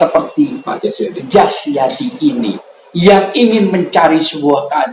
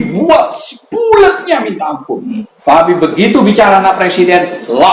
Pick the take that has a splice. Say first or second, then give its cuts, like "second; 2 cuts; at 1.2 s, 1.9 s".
second; 1 cut; at 2.5 s